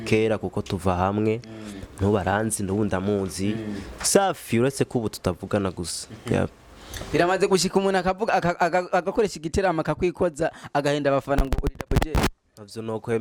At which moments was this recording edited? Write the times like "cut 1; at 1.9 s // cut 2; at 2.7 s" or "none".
none